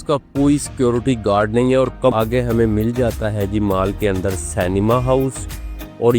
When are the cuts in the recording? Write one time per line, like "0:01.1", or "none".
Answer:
0:02.1